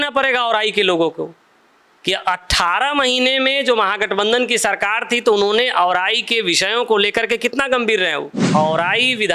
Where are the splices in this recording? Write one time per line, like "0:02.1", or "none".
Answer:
0:08.4